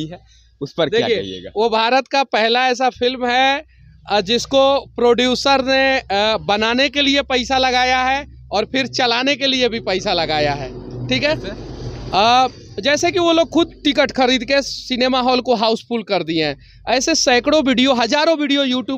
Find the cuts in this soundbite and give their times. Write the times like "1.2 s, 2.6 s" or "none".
none